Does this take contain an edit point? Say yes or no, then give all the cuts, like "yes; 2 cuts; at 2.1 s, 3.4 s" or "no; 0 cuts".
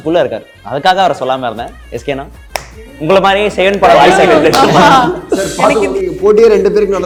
no; 0 cuts